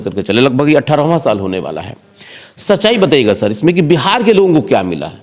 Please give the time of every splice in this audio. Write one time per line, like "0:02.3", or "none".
none